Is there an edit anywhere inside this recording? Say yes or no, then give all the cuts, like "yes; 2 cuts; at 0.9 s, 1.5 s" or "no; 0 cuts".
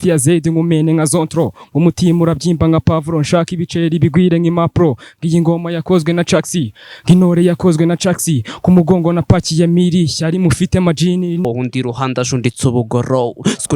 yes; 1 cut; at 11.4 s